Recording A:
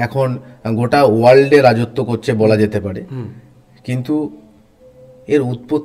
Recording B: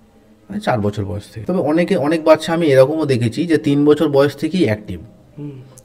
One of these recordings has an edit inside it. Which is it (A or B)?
B